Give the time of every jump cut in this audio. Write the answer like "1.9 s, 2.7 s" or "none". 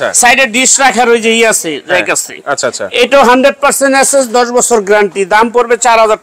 none